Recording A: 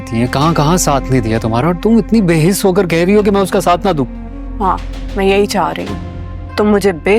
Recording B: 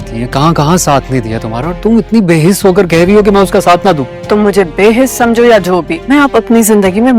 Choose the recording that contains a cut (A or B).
B